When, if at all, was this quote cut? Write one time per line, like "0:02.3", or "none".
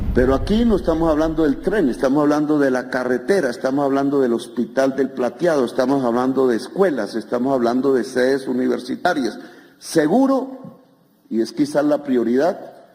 none